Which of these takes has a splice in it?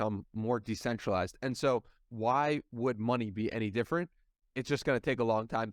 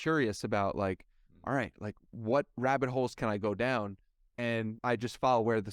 second; 1 cut; at 4.8 s

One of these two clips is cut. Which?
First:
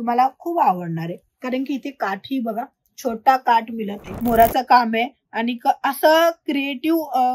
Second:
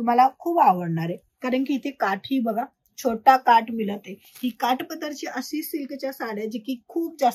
first; 1 cut; at 4.0 s

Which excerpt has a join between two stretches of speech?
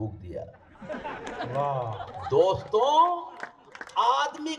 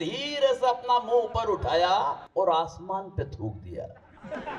second; 1 cut; at 2.2 s

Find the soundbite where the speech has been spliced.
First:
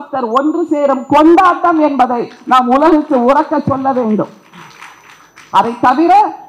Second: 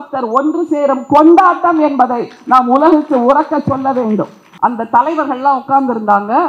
second; 1 cut; at 4.4 s

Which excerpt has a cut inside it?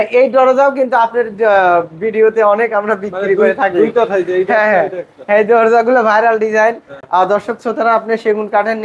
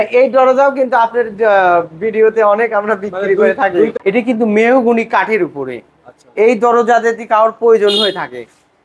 second; 1 cut; at 3.9 s

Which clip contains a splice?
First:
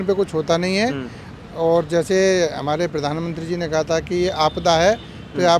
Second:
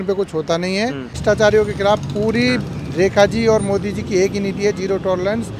second; 1 cut; at 1.2 s

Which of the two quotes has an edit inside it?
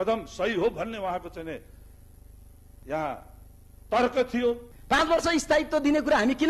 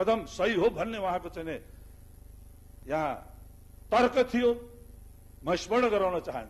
first; 1 cut; at 4.7 s

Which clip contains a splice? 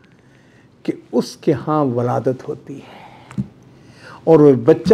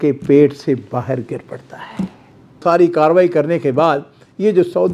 second; 1 cut; at 2.6 s

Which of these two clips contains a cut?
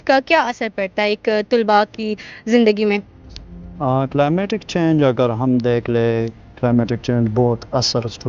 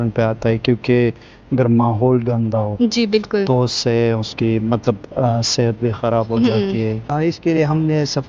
second; 1 cut; at 7.1 s

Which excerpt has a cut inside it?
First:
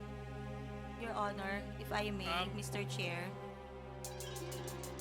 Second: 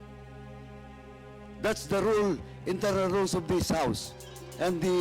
second; 1 cut; at 1.0 s

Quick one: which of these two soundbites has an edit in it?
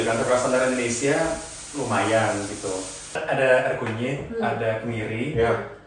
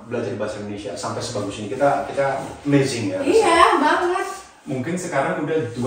first; 1 cut; at 3.2 s

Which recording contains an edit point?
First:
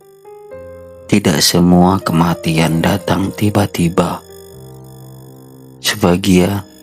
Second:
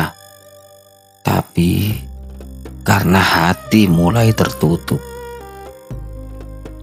first; 1 cut; at 1.0 s

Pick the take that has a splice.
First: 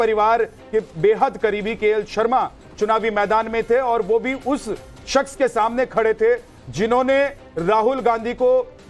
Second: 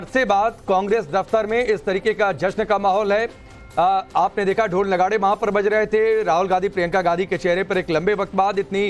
first; 1 cut; at 7.5 s

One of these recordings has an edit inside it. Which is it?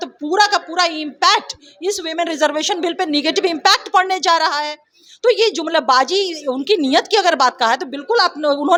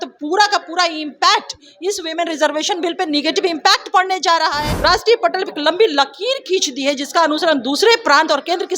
second; 1 cut; at 4.7 s

